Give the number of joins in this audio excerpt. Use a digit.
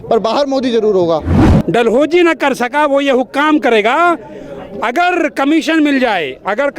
1